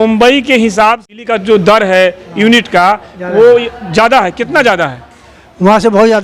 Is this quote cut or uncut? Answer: cut